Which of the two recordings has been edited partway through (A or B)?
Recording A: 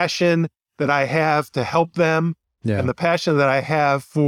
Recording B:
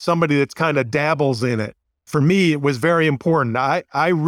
B